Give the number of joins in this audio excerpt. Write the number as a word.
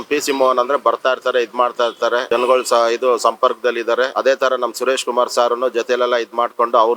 two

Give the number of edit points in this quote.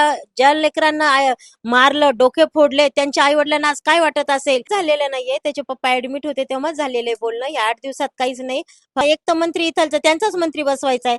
two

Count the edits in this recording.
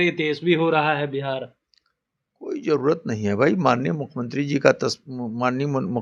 zero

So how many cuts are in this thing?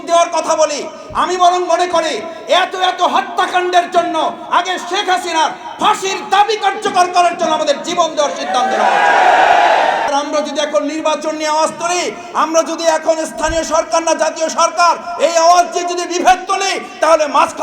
one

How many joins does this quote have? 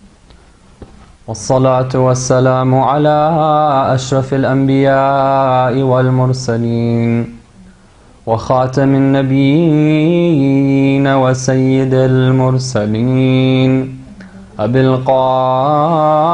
one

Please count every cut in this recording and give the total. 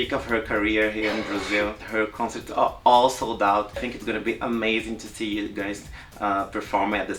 two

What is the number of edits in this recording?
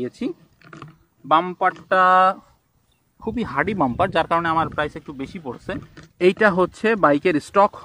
one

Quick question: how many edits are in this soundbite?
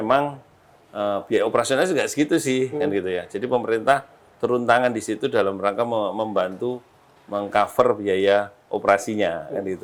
zero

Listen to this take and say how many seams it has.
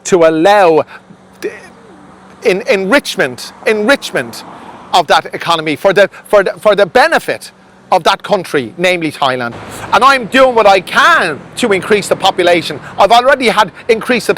one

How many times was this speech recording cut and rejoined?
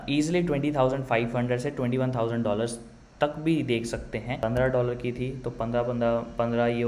one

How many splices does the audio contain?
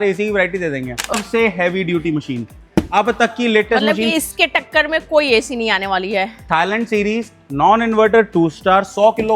one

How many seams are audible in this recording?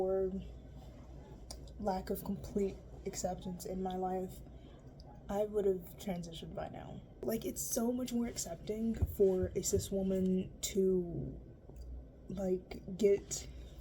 one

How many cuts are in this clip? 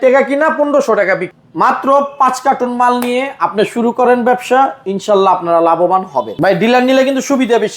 two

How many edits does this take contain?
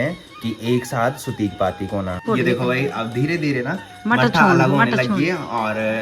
one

